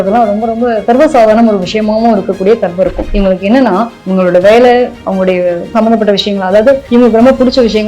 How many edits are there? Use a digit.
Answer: 1